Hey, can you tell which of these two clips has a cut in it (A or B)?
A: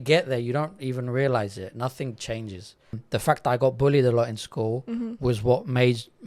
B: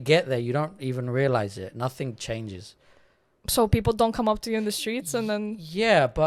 A